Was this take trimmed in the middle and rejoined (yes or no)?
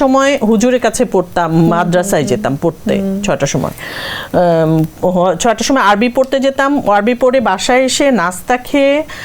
no